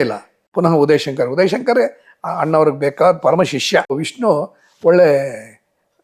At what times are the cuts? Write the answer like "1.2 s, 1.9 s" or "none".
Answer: 4.1 s